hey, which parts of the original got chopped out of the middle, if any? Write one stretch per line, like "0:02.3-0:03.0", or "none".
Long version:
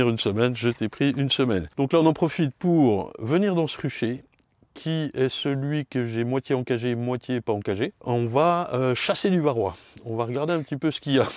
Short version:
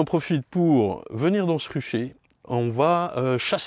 0:04.5-0:08.0